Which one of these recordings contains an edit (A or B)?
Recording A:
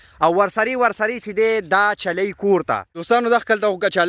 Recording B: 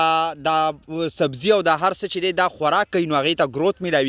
A